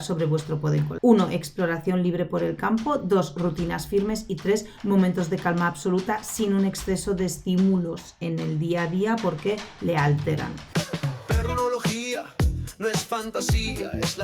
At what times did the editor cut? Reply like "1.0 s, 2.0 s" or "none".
0.9 s, 10.6 s